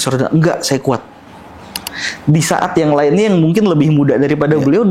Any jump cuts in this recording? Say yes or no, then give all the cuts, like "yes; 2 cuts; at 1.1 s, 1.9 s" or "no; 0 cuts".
no; 0 cuts